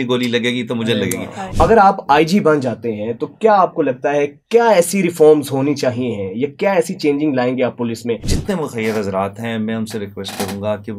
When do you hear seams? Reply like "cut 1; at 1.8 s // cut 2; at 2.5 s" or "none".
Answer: cut 1; at 1.5 s // cut 2; at 8.3 s

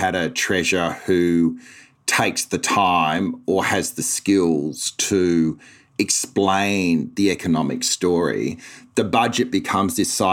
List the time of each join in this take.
none

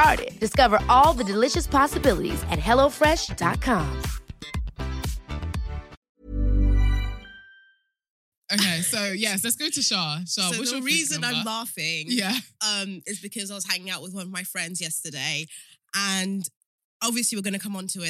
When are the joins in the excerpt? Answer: cut 1; at 6.0 s // cut 2; at 8.2 s

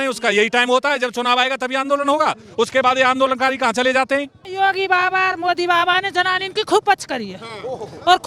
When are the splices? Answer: cut 1; at 4.4 s

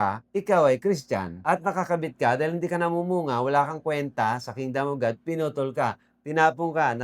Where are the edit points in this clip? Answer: cut 1; at 1.3 s

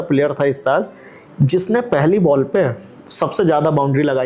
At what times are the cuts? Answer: none

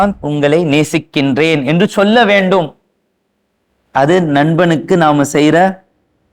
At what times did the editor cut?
none

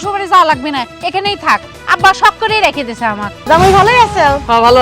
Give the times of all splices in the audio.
cut 1; at 3.3 s

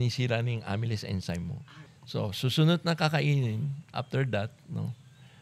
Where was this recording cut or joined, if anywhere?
cut 1; at 1.6 s

